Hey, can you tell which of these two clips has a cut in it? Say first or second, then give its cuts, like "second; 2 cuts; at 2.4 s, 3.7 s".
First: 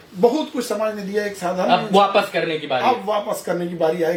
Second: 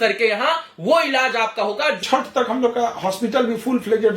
second; 1 cut; at 2.0 s